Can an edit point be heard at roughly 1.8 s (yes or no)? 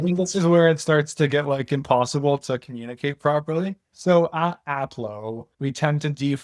no